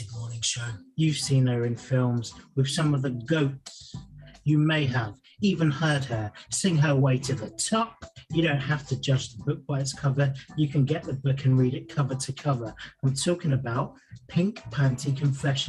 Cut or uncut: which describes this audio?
uncut